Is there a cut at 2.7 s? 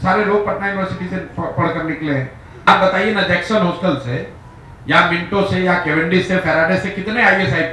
yes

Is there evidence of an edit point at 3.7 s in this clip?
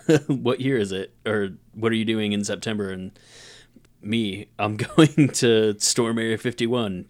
yes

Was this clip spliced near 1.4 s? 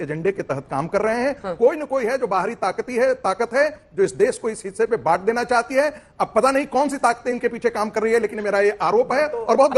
no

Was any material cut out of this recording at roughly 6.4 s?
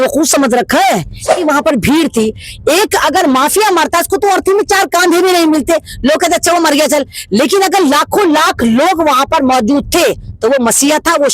no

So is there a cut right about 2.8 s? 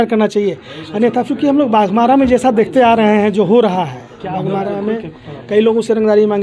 no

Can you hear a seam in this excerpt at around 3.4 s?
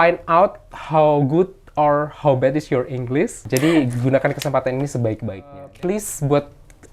yes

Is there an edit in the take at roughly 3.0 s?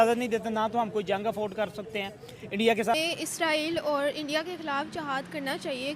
yes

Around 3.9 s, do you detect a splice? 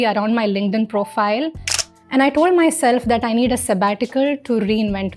no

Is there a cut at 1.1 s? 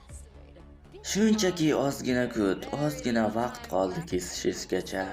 yes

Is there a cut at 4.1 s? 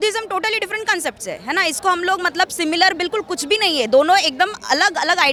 no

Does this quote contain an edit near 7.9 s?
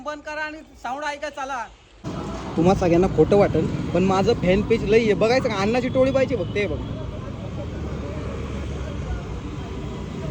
no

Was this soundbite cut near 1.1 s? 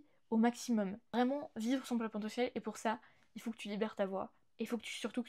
yes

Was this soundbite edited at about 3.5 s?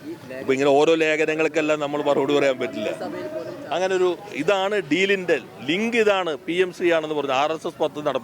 yes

